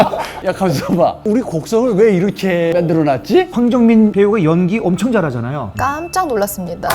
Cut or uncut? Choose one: cut